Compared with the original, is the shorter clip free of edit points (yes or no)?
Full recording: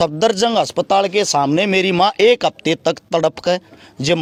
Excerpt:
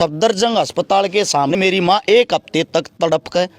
no